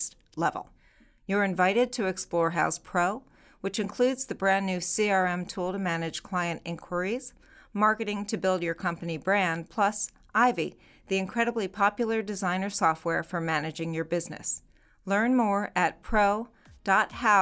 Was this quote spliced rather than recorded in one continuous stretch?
no; 0 cuts

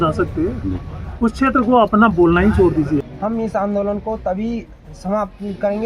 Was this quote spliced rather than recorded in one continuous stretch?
yes; 1 cut; at 3.1 s

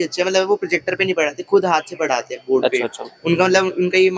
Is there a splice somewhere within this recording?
no; 0 cuts

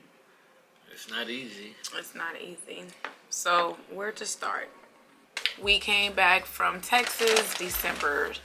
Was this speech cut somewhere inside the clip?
yes; 1 cut; at 5.4 s

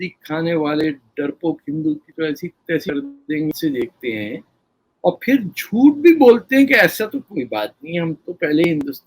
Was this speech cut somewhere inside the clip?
yes; 1 cut; at 3.5 s

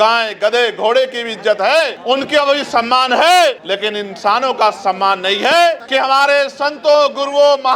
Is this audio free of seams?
no; 1 cut; at 5.8 s

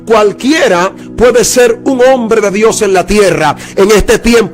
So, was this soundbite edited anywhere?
no; 0 cuts

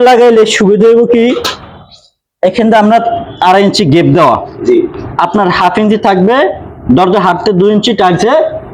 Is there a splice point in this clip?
no; 0 cuts

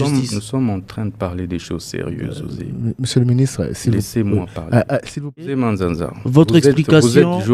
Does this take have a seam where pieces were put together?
yes; 1 cut; at 5.4 s

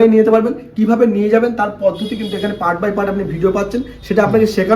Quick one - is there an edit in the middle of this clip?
no; 0 cuts

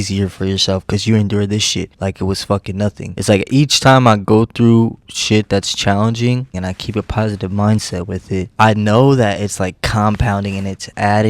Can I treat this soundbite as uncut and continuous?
no; 1 cut; at 6.5 s

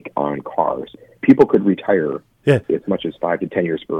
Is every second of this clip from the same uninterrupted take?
no; 2 cuts; at 0.9 s, 2.6 s

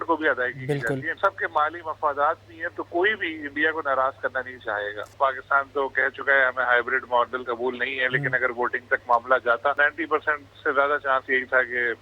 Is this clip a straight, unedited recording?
no; 4 cuts; at 1.2 s, 5.1 s, 7.4 s, 9.8 s

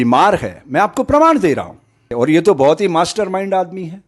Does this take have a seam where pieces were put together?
yes; 1 cut; at 2.1 s

